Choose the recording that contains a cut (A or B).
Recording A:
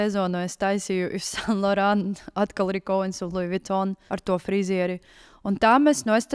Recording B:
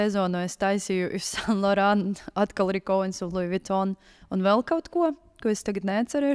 A